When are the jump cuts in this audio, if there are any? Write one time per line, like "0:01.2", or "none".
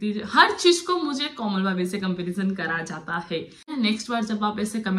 0:03.7